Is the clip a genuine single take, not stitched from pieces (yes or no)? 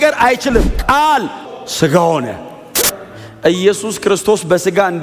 no